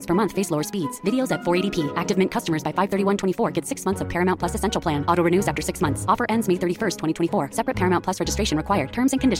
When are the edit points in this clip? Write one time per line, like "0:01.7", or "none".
none

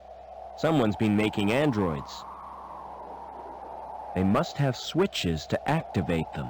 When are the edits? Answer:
0:02.0
0:04.1

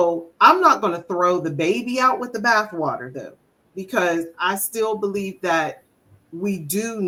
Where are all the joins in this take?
none

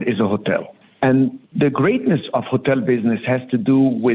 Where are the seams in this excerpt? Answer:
0:01.4

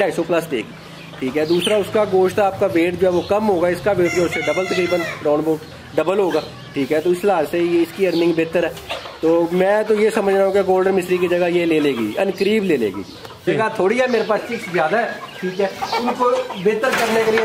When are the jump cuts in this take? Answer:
0:13.5

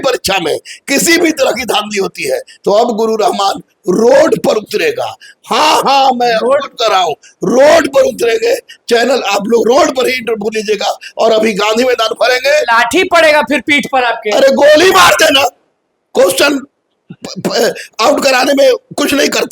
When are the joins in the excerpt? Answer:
none

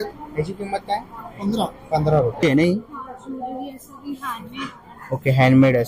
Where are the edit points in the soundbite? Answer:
0:02.4

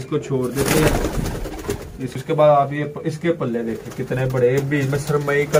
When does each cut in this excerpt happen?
0:02.1

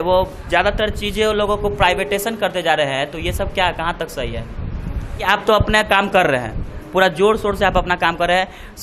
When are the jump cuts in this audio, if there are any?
0:05.3

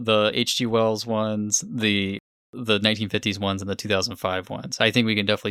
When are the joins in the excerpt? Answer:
none

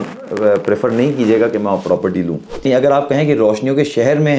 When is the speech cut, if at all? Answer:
0:02.7

